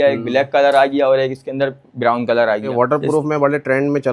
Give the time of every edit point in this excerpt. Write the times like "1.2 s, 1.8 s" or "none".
2.7 s